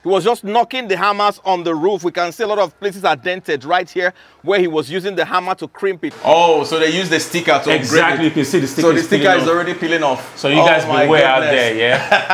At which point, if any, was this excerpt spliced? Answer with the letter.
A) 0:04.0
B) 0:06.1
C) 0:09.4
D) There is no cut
B